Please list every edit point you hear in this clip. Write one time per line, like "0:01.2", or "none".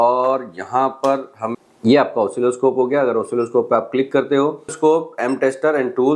0:01.4
0:04.7